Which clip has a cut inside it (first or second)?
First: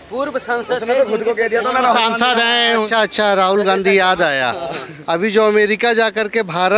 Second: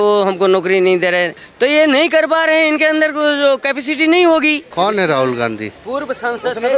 second